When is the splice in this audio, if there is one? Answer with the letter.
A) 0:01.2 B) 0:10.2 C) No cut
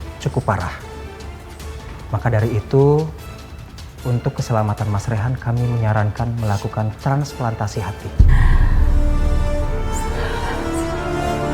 C